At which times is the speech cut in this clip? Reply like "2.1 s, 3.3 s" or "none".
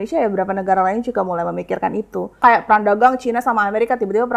2.4 s